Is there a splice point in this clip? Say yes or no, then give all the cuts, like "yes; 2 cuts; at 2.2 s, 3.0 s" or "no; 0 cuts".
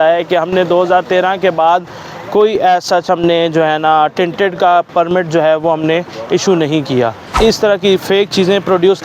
yes; 1 cut; at 7.2 s